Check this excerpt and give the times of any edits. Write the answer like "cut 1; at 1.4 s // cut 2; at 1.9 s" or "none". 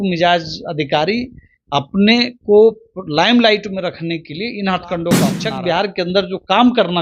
cut 1; at 5.3 s